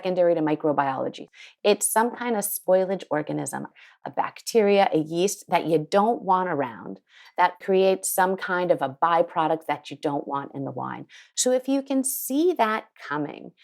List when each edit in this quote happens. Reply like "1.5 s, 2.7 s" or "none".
1.2 s, 3.8 s, 7.6 s